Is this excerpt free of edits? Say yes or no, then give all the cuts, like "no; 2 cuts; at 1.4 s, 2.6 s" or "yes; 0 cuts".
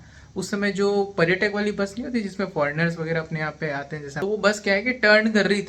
no; 1 cut; at 4.0 s